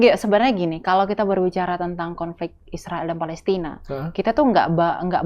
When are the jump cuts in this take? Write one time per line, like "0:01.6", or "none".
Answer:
none